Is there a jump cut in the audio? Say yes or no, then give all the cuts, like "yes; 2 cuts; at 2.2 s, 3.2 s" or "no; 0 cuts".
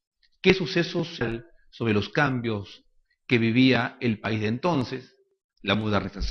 no; 0 cuts